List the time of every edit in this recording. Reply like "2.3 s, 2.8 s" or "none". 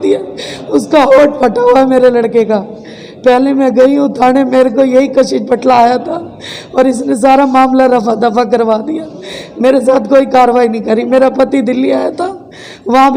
none